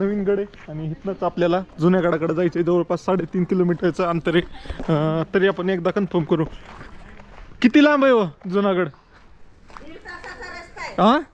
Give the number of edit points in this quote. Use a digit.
0